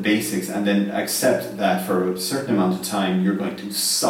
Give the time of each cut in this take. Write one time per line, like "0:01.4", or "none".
none